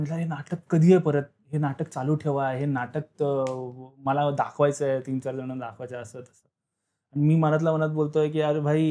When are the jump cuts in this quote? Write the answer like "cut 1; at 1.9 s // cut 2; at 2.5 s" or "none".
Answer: none